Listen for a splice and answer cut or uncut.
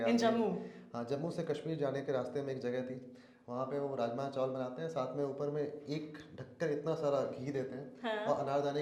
uncut